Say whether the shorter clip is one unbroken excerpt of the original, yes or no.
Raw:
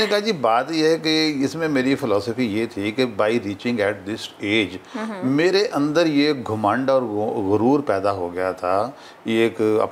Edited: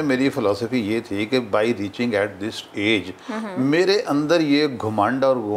yes